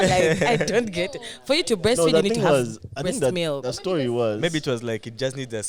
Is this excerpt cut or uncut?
uncut